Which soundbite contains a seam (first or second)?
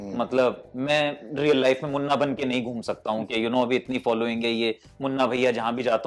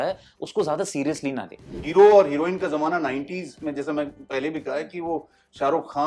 second